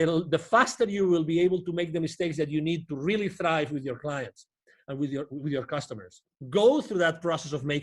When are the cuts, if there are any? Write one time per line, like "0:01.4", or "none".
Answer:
0:06.3